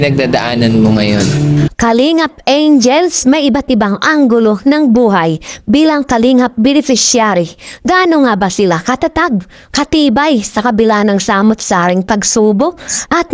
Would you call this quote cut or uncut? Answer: cut